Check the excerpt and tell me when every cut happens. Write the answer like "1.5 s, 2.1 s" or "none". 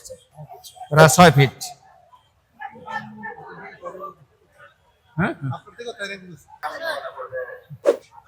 6.5 s